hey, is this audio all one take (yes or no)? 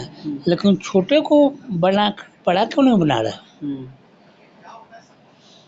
yes